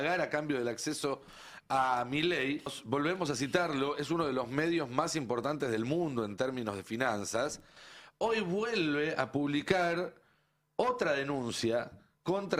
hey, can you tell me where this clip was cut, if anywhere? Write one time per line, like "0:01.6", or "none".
0:02.8